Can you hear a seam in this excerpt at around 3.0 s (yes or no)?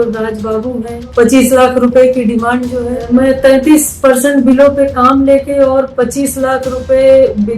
yes